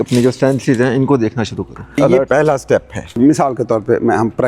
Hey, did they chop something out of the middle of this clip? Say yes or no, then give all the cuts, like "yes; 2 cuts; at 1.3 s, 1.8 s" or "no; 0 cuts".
yes; 1 cut; at 3.0 s